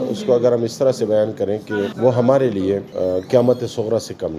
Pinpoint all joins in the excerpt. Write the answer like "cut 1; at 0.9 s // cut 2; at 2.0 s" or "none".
cut 1; at 1.9 s // cut 2; at 2.9 s